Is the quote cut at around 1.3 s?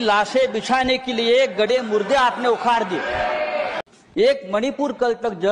no; 1 cut; at 3.8 s

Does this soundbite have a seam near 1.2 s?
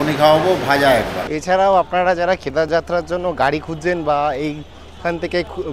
yes; 1 cut; at 1.2 s

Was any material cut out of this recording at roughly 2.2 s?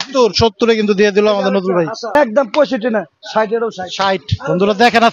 yes; 1 cut; at 2.2 s

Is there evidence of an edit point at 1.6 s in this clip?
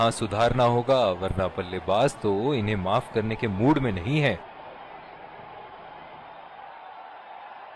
no; 1 cut; at 4.4 s

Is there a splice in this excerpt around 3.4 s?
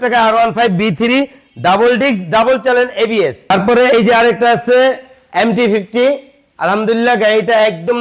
no; 0 cuts

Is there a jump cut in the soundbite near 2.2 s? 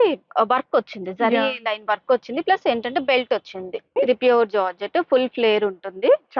no; 1 cut; at 4.0 s

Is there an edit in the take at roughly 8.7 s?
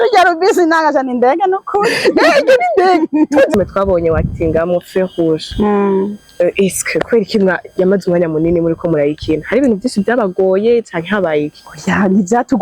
no; 1 cut; at 3.5 s

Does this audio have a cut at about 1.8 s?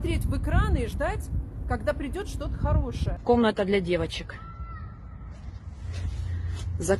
no; 1 cut; at 3.1 s

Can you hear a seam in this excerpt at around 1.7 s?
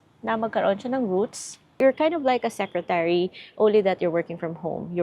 yes; 1 cut; at 1.7 s

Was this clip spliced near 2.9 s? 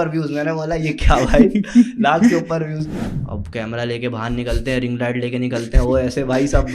yes; 1 cut; at 2.9 s

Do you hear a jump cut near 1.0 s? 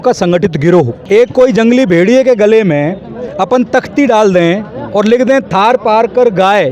yes; 1 cut; at 1.0 s

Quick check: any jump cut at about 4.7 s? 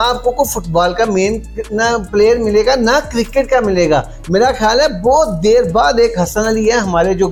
no; 0 cuts

